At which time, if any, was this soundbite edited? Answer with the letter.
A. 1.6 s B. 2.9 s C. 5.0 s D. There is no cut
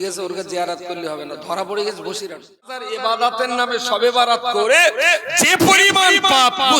B